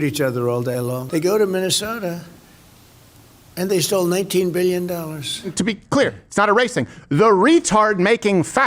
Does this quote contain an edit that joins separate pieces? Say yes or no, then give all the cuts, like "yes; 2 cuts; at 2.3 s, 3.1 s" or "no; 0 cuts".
yes; 2 cuts; at 1.0 s, 5.5 s